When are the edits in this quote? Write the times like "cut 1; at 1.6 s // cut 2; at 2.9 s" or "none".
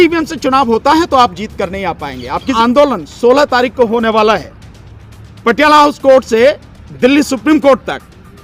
cut 1; at 2.5 s

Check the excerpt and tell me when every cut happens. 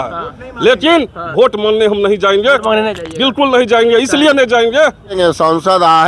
cut 1; at 5.1 s

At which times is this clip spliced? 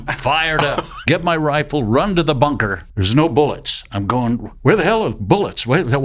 cut 1; at 0.9 s // cut 2; at 2.9 s

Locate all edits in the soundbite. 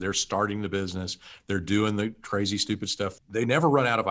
cut 1; at 3.2 s

